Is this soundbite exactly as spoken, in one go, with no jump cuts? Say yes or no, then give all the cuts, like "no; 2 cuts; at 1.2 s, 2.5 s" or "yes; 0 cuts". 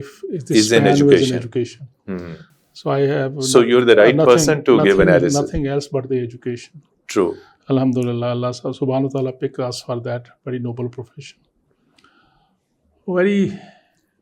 yes; 0 cuts